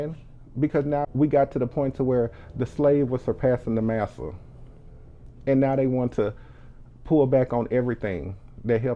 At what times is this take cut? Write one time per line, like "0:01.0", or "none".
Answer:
0:01.0